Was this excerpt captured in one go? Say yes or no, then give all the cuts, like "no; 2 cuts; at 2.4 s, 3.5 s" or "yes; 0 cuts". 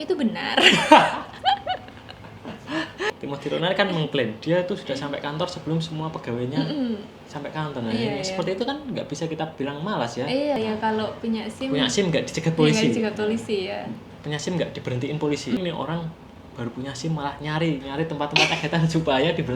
no; 3 cuts; at 3.1 s, 10.6 s, 15.6 s